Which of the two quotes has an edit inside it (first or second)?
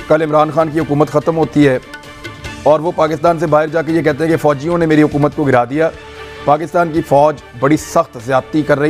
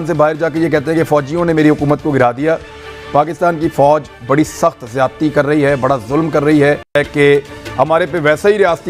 second